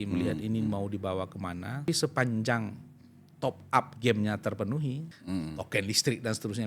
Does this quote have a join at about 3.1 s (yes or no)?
no